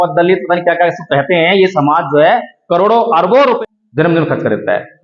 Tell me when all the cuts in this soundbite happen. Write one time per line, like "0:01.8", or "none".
0:03.6